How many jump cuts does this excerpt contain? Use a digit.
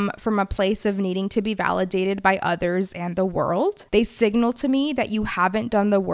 1